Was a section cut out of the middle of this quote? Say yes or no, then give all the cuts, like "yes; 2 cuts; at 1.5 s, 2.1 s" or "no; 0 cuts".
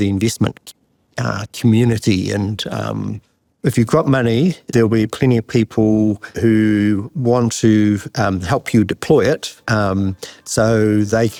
no; 0 cuts